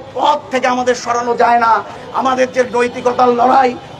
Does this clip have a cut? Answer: yes; 1 cut; at 2.0 s

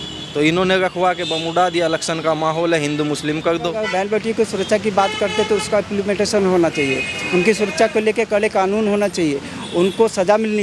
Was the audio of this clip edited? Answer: yes; 1 cut; at 3.8 s

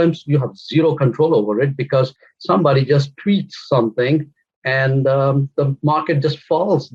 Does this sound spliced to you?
no; 0 cuts

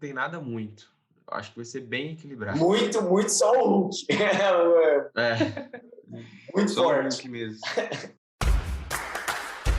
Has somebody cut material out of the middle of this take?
yes; 1 cut; at 8.3 s

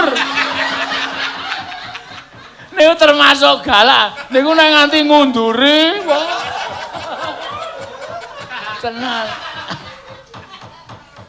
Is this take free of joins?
yes; 0 cuts

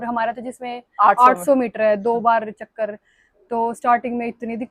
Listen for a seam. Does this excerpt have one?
no; 0 cuts

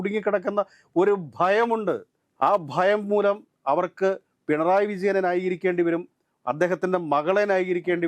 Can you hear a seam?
no; 0 cuts

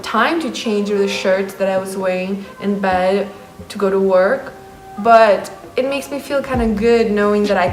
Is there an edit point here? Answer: no; 0 cuts

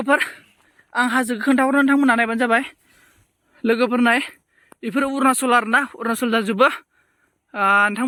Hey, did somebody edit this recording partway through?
no; 0 cuts

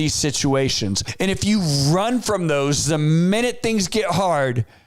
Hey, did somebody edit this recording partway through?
yes; 1 cut; at 1.1 s

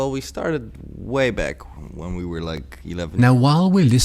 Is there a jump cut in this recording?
no; 0 cuts

